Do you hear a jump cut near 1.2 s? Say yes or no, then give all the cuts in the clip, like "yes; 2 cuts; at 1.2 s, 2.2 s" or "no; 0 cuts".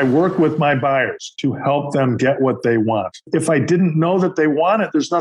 yes; 2 cuts; at 1.2 s, 3.2 s